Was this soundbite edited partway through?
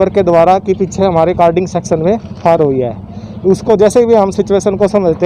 no; 0 cuts

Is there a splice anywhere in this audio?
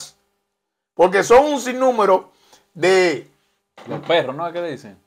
no; 0 cuts

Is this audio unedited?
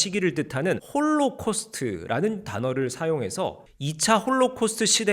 no; 1 cut; at 3.7 s

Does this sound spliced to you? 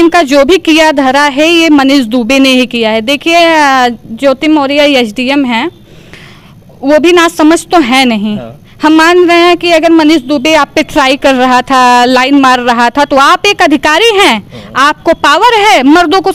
no; 0 cuts

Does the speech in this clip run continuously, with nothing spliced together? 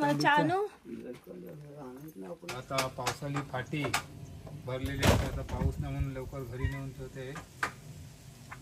no; 1 cut; at 2.5 s

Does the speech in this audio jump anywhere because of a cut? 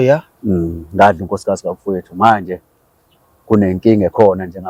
no; 0 cuts

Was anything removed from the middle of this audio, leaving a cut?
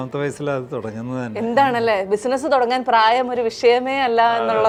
no; 0 cuts

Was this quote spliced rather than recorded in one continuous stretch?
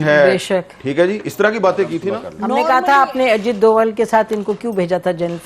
yes; 1 cut; at 2.0 s

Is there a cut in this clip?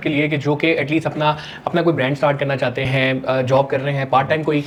no; 0 cuts

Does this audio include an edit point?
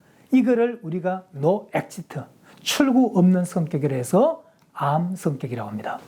no; 0 cuts

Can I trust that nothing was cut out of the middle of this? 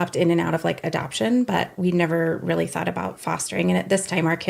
yes; 0 cuts

